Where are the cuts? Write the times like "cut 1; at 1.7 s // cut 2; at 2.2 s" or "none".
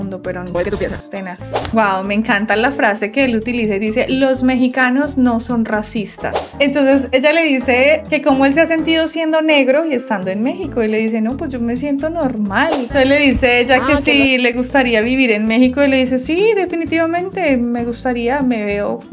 cut 1; at 1.7 s // cut 2; at 6.5 s // cut 3; at 12.9 s